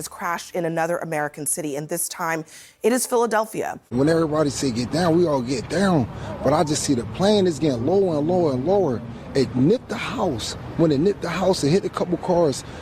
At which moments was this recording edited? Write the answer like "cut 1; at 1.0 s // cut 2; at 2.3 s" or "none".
cut 1; at 3.8 s